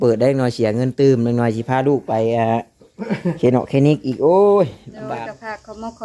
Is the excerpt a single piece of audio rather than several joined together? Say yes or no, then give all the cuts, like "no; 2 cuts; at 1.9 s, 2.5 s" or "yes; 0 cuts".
no; 1 cut; at 5.1 s